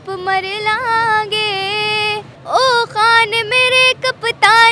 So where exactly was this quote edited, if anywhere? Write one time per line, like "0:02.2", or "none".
0:02.3